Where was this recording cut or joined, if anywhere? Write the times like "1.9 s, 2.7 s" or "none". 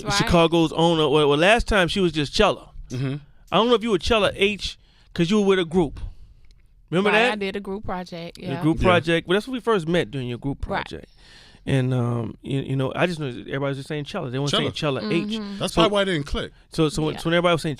14.6 s

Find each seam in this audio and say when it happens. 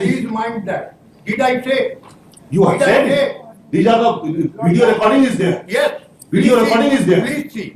none

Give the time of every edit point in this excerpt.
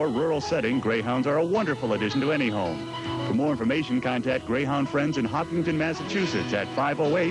4.1 s

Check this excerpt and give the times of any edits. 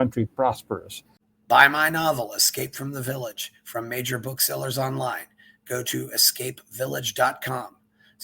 1.1 s

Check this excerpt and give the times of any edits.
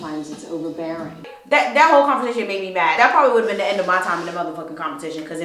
1.3 s, 3.0 s

